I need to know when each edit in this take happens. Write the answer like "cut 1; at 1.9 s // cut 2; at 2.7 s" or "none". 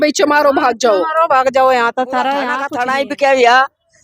cut 1; at 2.6 s